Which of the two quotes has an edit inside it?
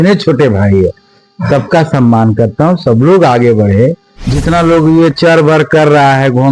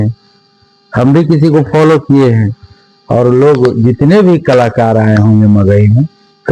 first; 1 cut; at 4.3 s

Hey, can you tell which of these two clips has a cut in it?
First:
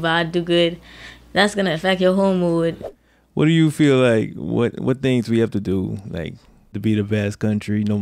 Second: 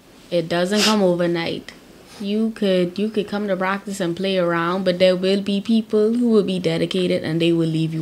first; 2 cuts; at 2.9 s, 6.8 s

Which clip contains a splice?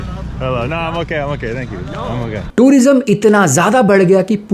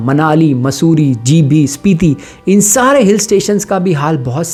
first; 1 cut; at 2.4 s

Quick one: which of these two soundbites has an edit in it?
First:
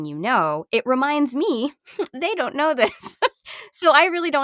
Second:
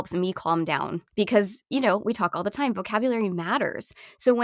second; 1 cut; at 1.0 s

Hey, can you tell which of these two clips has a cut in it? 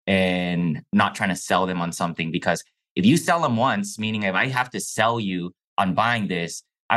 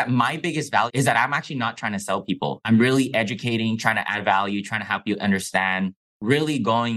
second; 3 cuts; at 0.9 s, 2.6 s, 6.1 s

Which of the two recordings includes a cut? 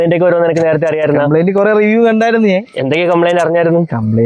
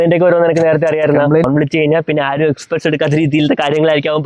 second; 1 cut; at 1.4 s

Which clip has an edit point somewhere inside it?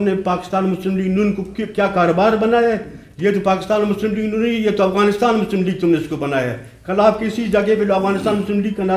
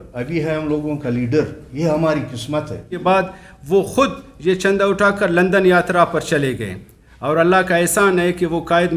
second; 1 cut; at 3.0 s

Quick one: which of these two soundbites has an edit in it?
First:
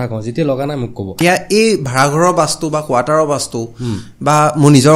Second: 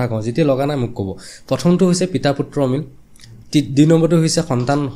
first; 1 cut; at 1.2 s

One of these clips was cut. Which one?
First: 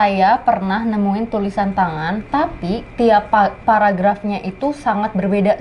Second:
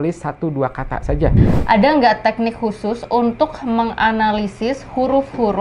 second; 1 cut; at 1.5 s

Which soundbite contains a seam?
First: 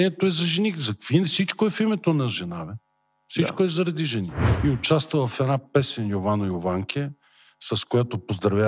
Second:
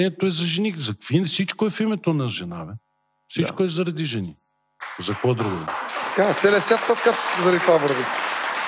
first; 1 cut; at 4.4 s

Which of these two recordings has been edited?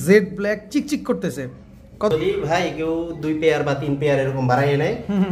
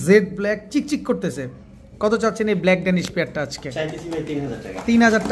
first; 1 cut; at 2.1 s

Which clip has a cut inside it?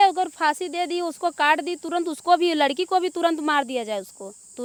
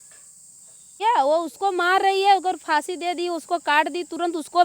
second; 1 cut; at 1.0 s

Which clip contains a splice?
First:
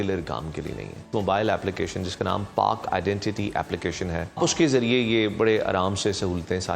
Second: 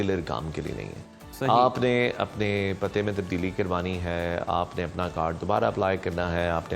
first; 2 cuts; at 1.1 s, 4.4 s

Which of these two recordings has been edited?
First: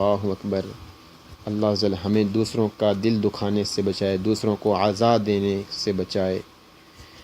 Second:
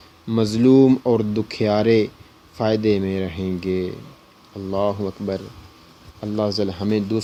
first; 1 cut; at 4.5 s

